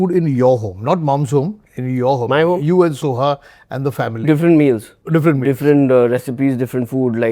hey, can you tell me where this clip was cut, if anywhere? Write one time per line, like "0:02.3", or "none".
0:04.9